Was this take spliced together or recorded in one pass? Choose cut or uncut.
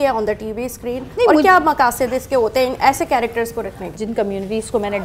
uncut